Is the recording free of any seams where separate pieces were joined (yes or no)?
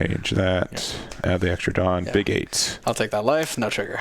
no